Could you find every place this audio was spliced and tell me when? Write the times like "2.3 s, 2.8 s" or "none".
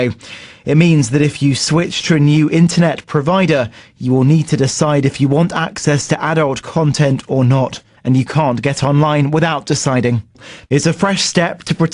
1.4 s